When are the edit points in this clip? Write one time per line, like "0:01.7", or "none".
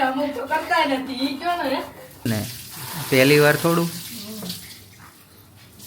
0:02.2

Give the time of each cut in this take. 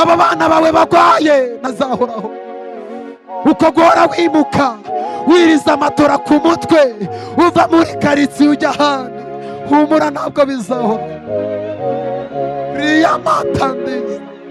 0:01.7

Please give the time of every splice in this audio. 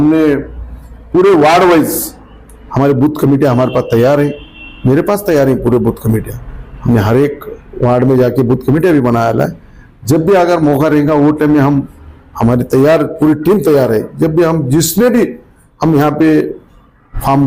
none

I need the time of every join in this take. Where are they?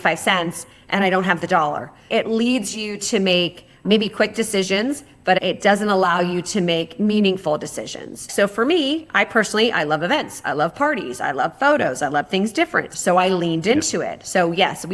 0:02.1
0:05.4
0:08.3
0:12.9

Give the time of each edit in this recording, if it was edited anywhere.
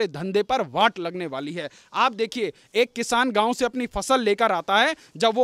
none

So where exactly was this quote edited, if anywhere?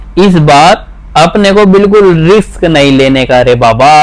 none

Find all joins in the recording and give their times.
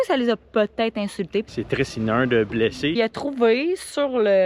0:01.5
0:03.0

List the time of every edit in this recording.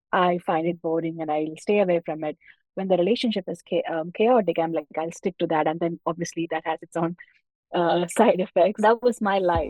0:08.8

